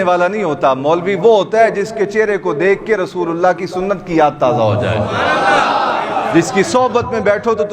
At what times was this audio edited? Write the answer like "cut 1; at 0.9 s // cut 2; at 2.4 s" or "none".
none